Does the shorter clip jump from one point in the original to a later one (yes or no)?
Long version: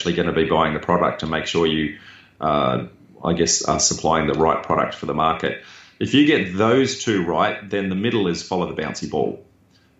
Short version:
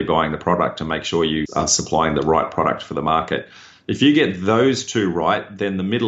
yes